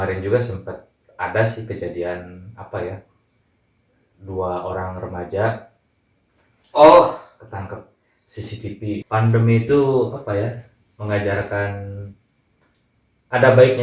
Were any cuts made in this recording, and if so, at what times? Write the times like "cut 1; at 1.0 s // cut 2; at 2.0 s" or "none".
cut 1; at 9.0 s